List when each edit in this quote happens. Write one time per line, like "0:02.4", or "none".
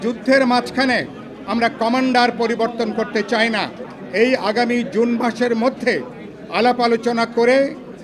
0:03.8